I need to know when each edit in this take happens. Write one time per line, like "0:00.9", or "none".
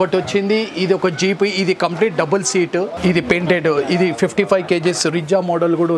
0:02.9